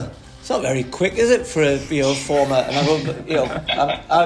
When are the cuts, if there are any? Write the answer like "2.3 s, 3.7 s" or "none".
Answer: none